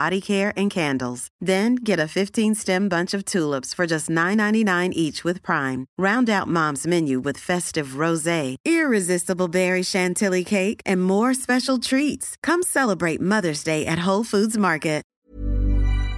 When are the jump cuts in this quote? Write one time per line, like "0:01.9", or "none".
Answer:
0:15.1